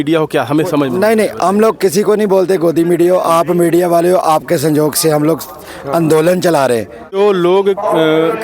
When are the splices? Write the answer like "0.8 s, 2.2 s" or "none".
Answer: 7.1 s